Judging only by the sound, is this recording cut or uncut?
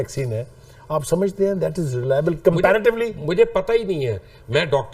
uncut